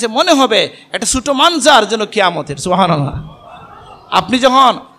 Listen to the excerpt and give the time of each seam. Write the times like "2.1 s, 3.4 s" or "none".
none